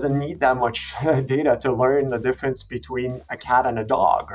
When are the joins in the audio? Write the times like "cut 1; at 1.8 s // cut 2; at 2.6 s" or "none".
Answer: none